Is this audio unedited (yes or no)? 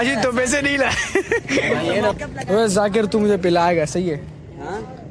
yes